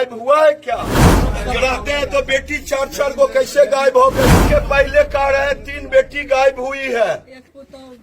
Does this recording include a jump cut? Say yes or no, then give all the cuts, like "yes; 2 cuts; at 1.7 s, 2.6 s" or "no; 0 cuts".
yes; 2 cuts; at 1.2 s, 4.4 s